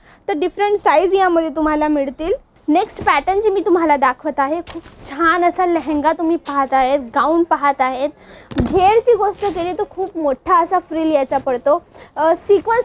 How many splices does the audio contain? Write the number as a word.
one